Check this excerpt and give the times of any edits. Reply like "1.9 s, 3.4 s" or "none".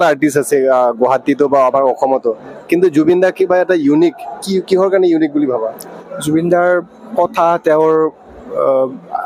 none